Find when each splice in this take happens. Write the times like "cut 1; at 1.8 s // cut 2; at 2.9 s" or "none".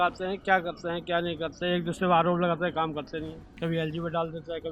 cut 1; at 3.4 s